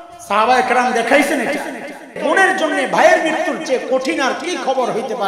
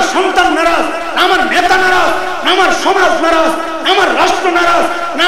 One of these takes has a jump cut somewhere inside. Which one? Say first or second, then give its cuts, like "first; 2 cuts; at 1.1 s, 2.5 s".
first; 1 cut; at 2.2 s